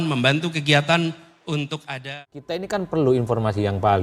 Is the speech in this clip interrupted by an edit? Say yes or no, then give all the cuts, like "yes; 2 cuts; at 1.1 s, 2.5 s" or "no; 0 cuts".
yes; 1 cut; at 1.9 s